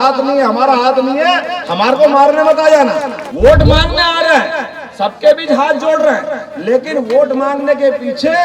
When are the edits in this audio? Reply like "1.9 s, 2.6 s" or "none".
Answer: 3.2 s